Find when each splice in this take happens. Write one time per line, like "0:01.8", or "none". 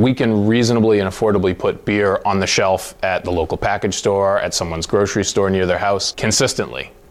none